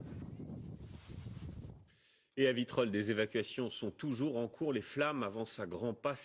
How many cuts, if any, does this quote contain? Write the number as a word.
one